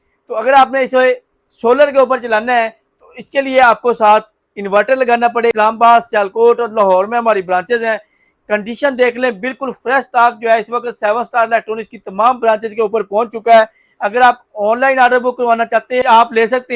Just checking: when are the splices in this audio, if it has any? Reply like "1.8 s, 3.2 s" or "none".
5.5 s, 16.0 s

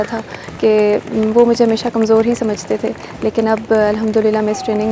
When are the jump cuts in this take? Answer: none

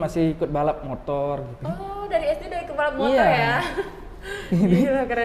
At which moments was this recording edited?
none

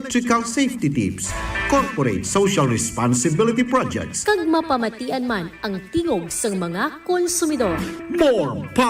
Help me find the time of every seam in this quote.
none

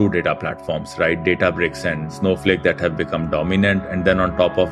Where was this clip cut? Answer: 2.1 s

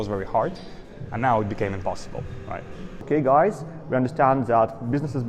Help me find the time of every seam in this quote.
3.0 s

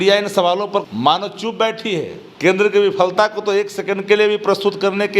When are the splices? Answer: 0.9 s, 2.2 s

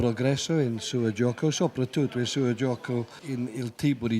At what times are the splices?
3.2 s

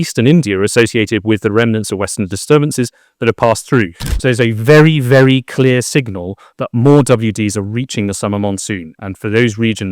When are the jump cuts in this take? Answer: 4.0 s

